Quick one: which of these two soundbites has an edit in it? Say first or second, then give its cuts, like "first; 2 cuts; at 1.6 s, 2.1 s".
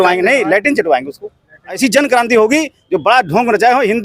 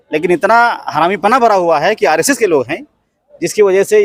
first; 1 cut; at 1.8 s